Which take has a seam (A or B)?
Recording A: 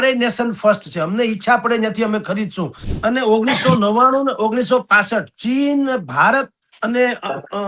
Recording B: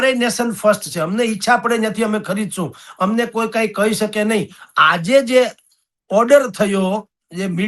A